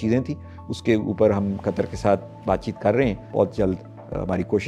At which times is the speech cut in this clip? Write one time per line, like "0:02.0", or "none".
0:03.2